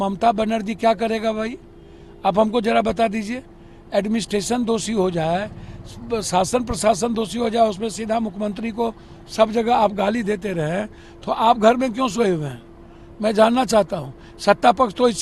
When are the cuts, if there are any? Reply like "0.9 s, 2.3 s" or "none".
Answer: none